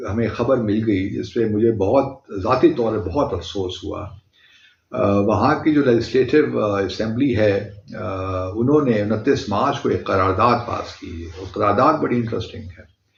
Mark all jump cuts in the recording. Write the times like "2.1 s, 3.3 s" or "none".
none